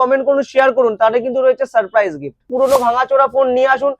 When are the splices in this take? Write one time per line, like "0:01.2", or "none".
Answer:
0:02.5